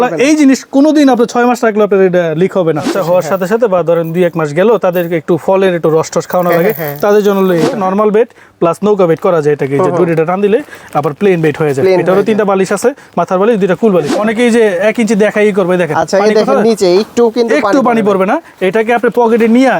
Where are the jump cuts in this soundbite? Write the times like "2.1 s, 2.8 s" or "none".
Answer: 2.9 s, 7.7 s, 14.2 s